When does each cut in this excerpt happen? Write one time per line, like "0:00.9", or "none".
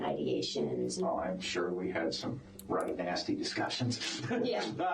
0:00.9